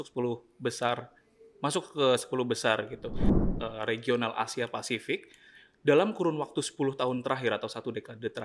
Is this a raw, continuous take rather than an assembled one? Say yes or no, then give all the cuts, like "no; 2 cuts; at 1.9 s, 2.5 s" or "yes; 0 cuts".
no; 1 cut; at 3.3 s